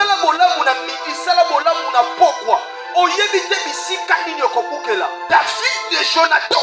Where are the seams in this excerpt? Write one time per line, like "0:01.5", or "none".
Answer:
0:05.2